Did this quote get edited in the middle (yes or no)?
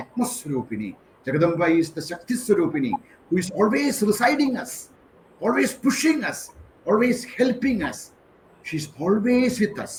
no